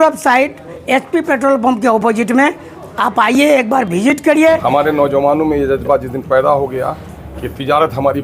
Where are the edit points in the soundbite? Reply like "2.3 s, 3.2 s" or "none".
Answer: 4.6 s